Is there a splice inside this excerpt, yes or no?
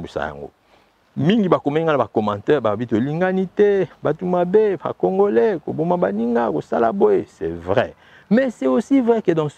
no